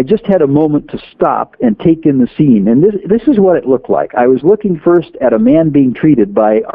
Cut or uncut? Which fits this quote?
uncut